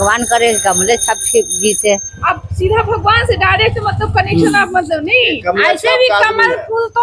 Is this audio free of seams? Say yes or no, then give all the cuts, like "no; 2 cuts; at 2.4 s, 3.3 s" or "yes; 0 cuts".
yes; 0 cuts